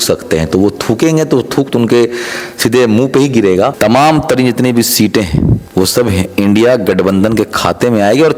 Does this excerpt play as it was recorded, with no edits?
no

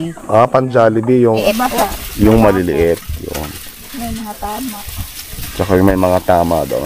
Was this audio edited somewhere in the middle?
yes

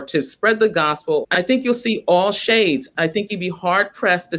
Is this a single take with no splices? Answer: no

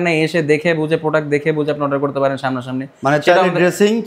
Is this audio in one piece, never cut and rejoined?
yes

